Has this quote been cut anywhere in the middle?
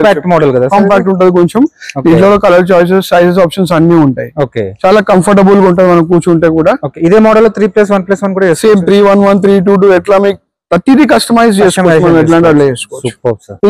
no; 0 cuts

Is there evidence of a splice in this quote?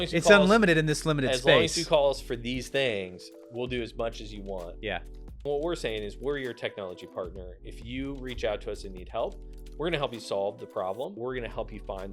yes; 2 cuts; at 5.5 s, 11.2 s

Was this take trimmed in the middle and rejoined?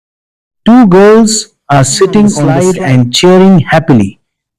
yes; 1 cut; at 2.6 s

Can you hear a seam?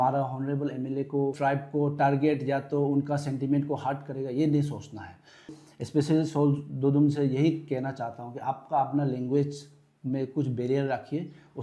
yes; 2 cuts; at 1.4 s, 5.6 s

